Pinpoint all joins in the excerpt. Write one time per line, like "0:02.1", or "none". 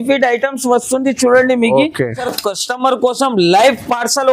0:02.2